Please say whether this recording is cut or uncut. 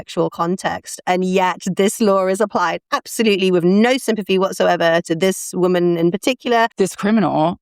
cut